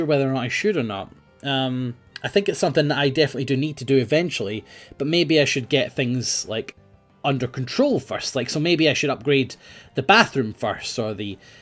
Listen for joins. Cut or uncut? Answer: cut